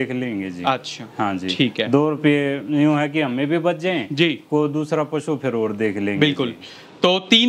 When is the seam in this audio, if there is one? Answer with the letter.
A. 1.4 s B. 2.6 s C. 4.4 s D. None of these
D